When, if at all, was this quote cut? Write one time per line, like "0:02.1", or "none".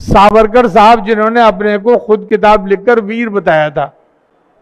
none